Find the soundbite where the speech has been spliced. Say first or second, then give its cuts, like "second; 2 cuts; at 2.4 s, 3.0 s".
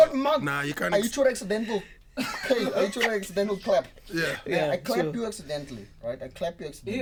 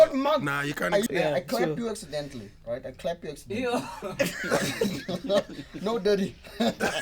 second; 1 cut; at 1.1 s